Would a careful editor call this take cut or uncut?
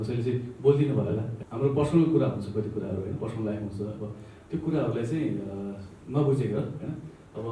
cut